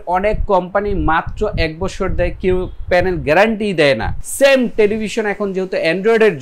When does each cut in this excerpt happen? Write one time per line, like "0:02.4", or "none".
0:04.2